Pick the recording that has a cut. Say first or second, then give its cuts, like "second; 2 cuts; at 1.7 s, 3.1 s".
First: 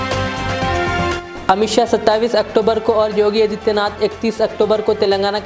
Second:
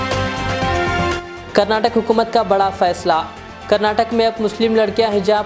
second; 1 cut; at 1.2 s